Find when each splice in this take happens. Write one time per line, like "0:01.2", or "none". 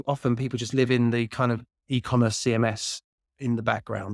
none